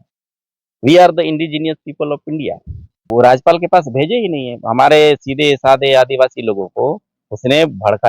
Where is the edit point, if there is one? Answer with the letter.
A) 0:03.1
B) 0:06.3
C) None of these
A